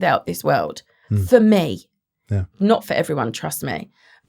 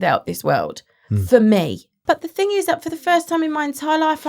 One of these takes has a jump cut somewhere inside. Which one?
second; 1 cut; at 1.9 s

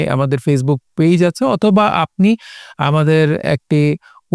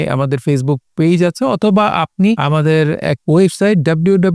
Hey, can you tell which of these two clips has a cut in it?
second; 1 cut; at 2.9 s

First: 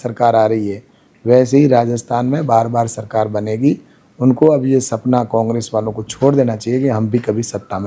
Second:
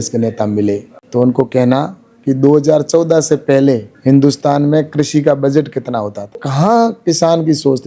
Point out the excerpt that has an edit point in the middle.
second; 1 cut; at 6.4 s

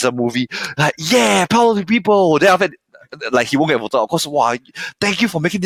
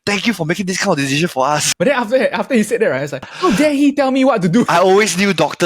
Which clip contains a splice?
second; 3 cuts; at 1.7 s, 3.3 s, 4.7 s

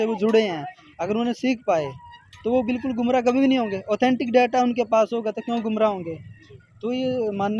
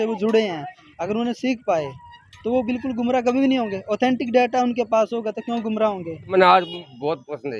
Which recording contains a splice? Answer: second; 1 cut; at 6.3 s

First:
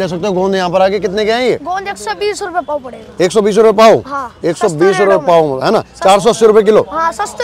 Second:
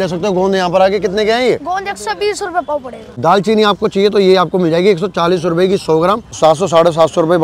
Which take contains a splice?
second; 2 cuts; at 3.1 s, 6.3 s

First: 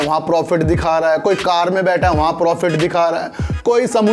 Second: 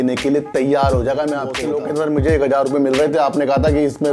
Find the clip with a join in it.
second; 1 cut; at 1.6 s

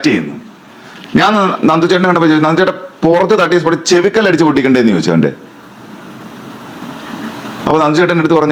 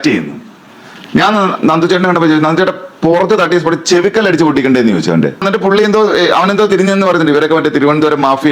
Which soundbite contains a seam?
second; 1 cut; at 5.4 s

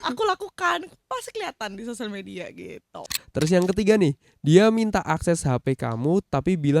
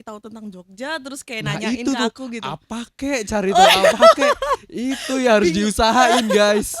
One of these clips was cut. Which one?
first; 1 cut; at 3.0 s

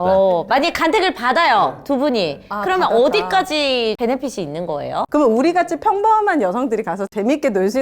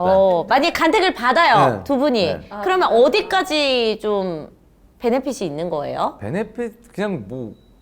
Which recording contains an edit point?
first; 2 cuts; at 4.0 s, 5.1 s

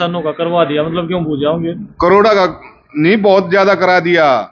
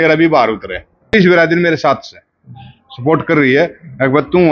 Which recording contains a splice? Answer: second; 1 cut; at 1.1 s

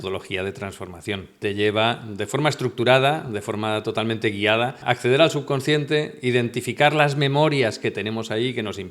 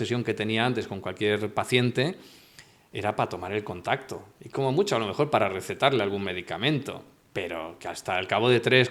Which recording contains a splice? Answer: first; 2 cuts; at 1.4 s, 4.8 s

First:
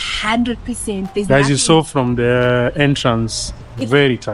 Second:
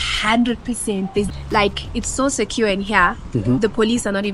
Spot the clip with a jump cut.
second; 1 cut; at 1.3 s

